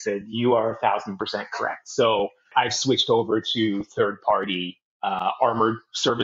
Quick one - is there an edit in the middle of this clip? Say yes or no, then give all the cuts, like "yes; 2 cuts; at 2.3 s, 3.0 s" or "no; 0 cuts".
yes; 1 cut; at 2.5 s